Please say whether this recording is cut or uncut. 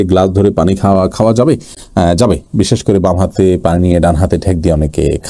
uncut